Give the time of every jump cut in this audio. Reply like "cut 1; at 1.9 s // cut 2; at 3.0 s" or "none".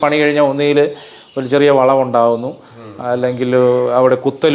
none